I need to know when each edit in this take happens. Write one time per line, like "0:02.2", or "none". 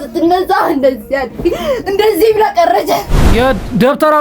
0:03.3